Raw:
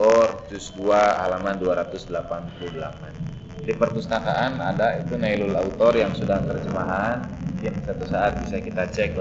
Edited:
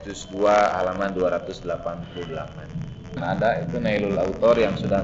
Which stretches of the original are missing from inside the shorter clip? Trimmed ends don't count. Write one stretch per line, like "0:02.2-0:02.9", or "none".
0:03.6-0:04.5